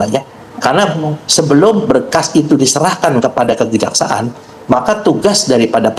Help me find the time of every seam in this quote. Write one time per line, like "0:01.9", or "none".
none